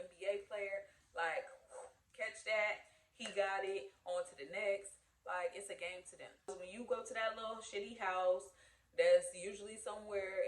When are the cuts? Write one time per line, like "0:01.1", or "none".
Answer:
0:06.6